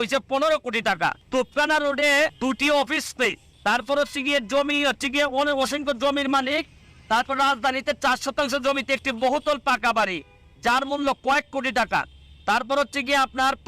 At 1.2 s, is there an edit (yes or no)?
yes